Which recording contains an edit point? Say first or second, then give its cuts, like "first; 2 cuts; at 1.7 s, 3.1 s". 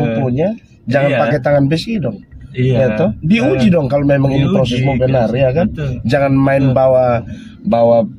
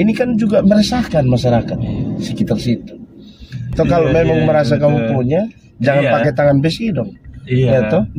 second; 1 cut; at 3.7 s